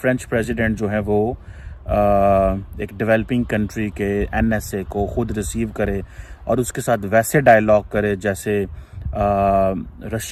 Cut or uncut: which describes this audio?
uncut